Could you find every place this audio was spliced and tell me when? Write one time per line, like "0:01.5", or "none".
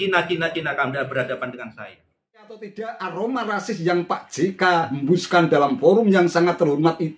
0:02.7